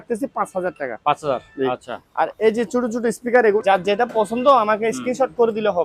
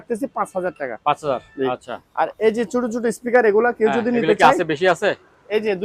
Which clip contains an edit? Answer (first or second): first